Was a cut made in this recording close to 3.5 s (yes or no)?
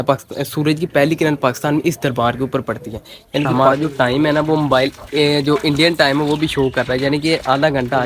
yes